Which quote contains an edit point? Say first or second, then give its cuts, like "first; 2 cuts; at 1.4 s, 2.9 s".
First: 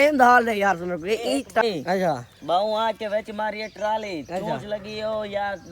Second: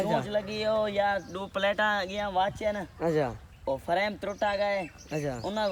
first; 1 cut; at 1.6 s